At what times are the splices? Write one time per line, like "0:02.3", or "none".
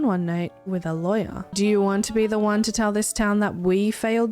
0:01.4